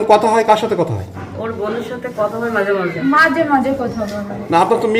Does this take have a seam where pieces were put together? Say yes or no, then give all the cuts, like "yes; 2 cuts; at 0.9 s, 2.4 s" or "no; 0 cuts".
no; 0 cuts